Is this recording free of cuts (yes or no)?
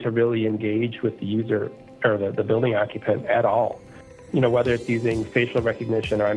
no